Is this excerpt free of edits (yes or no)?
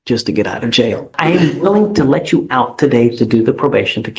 no